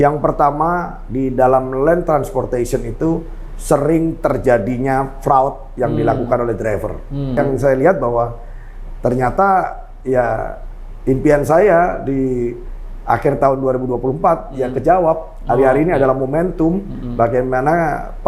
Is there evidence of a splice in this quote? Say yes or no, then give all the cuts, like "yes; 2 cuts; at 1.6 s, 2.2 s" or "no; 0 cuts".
yes; 1 cut; at 7.4 s